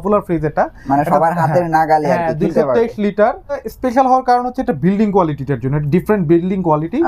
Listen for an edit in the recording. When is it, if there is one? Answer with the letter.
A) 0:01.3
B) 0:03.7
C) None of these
B